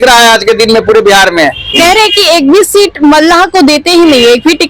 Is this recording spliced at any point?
yes; 1 cut; at 1.7 s

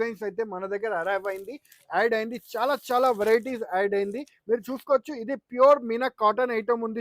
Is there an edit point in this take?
no; 0 cuts

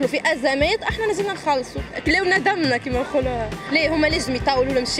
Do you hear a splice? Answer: yes; 2 cuts; at 1.9 s, 3.6 s

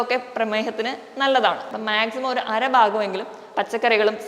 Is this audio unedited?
no; 1 cut; at 1.7 s

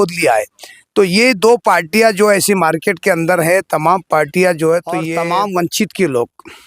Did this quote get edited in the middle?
yes; 1 cut; at 5.1 s

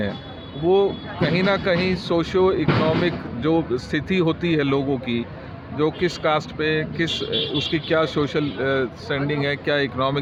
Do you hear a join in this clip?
no; 0 cuts

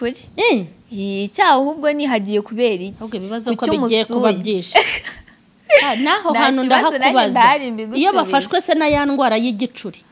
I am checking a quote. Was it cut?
no; 0 cuts

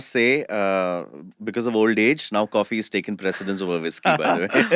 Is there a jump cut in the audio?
no; 0 cuts

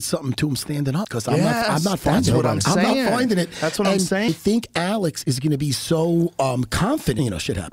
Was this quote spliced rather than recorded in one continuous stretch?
no; 0 cuts

